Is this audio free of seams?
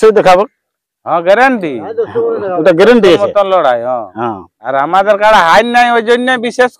yes; 0 cuts

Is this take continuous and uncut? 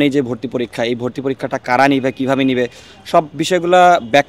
yes; 0 cuts

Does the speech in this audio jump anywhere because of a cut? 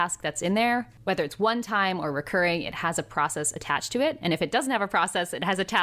yes; 1 cut; at 0.9 s

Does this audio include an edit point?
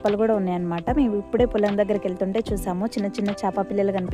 no; 0 cuts

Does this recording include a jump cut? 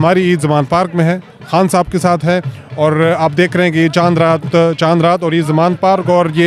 no; 0 cuts

